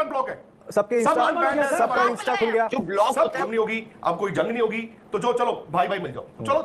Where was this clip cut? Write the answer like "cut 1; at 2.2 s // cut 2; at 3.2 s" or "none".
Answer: cut 1; at 3.5 s